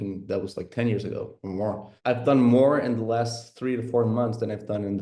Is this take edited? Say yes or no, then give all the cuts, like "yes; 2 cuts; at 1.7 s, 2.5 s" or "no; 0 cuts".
yes; 1 cut; at 1.9 s